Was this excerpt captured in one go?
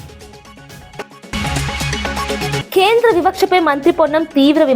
no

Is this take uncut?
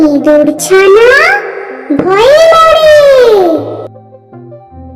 no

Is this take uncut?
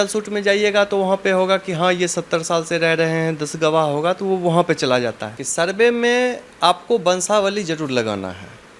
no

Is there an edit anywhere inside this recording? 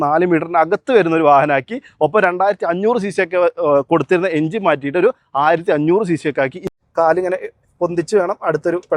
yes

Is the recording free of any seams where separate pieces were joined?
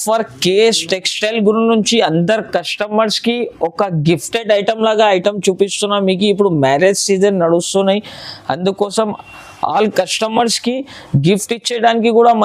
yes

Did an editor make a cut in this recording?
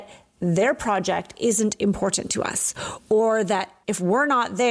yes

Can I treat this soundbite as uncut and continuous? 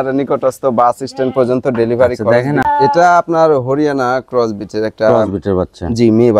no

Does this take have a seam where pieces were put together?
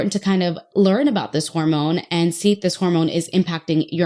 no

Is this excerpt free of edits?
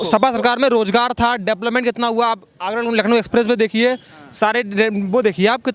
yes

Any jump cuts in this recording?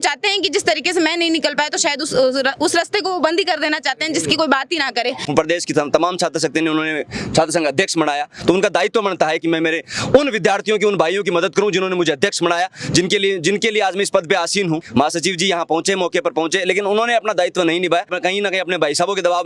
yes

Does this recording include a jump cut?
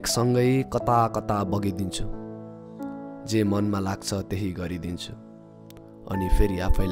no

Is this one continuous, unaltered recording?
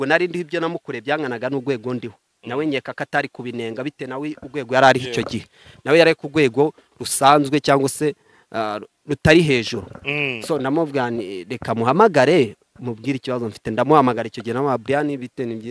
yes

